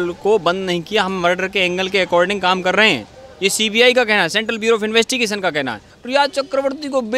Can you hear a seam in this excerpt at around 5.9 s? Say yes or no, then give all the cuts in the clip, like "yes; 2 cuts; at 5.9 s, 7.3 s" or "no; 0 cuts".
yes; 1 cut; at 5.9 s